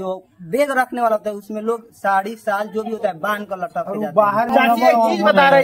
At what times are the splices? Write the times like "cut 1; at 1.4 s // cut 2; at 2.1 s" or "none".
cut 1; at 4.5 s